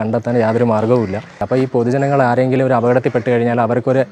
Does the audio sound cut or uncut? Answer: cut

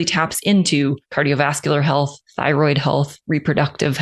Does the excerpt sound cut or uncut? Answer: cut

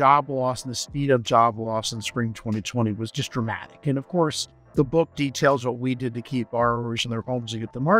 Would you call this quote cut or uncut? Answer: cut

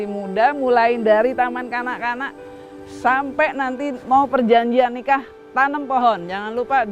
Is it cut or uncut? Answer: uncut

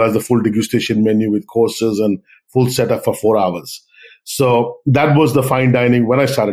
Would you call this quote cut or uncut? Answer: uncut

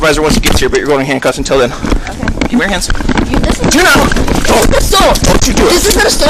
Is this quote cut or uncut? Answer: uncut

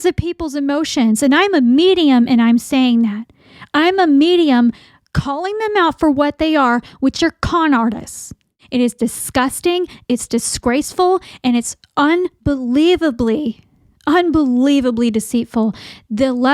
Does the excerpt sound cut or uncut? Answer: cut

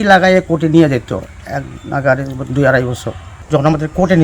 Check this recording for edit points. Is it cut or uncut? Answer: cut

